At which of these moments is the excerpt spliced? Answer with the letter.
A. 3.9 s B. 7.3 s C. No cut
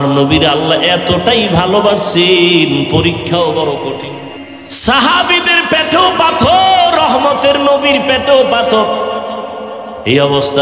A